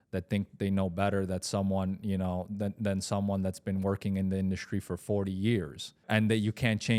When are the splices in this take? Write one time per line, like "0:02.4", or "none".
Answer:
0:06.1